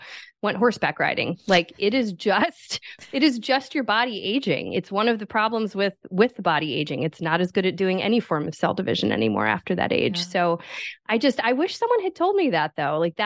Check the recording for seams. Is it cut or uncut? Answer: uncut